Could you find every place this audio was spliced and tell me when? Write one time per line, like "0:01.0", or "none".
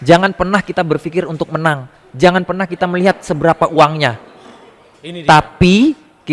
none